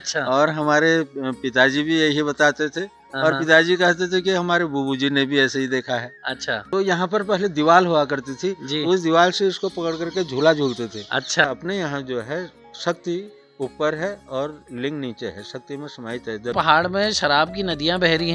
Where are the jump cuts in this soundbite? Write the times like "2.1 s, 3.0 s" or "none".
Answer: 6.6 s, 11.5 s, 16.5 s